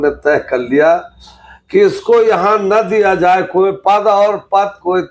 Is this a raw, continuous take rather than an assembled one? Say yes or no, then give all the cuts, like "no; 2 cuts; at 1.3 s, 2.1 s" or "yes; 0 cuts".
yes; 0 cuts